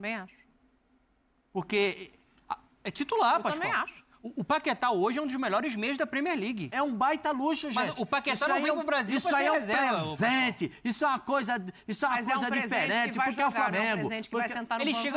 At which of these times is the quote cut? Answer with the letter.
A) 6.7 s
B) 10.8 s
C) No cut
A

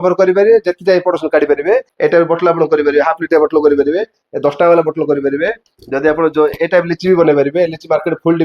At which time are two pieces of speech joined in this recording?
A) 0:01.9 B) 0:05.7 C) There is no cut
A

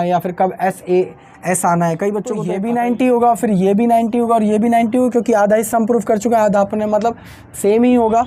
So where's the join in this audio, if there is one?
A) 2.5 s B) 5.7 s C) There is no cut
A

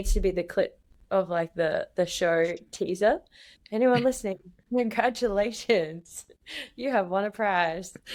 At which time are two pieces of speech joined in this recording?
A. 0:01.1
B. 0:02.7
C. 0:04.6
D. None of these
D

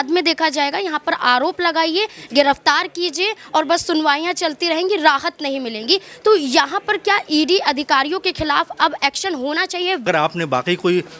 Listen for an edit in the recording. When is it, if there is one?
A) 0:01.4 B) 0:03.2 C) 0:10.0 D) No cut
C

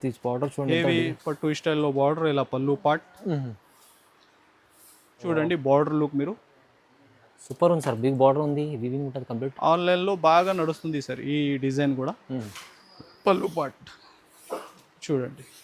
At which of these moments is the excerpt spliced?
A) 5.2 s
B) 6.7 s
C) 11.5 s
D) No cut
A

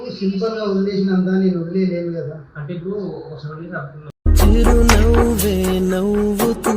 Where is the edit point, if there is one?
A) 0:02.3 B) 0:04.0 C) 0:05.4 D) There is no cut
B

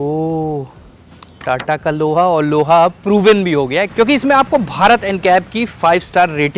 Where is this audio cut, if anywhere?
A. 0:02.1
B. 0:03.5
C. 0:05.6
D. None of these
D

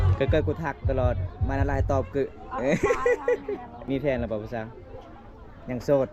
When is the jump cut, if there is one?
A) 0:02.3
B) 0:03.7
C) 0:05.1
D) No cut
B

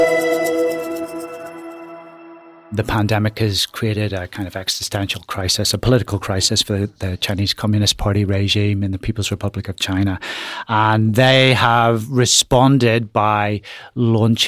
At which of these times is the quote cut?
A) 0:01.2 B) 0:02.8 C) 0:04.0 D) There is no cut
B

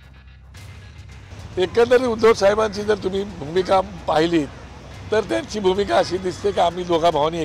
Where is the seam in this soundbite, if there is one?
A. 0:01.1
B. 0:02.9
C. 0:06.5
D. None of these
A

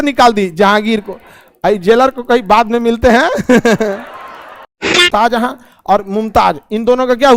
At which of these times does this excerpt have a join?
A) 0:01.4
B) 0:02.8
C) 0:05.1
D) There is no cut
C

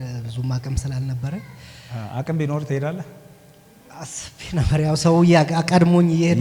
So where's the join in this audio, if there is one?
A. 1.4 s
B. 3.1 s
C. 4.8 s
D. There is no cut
D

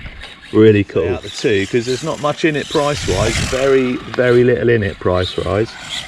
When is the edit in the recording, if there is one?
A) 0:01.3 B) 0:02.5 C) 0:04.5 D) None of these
A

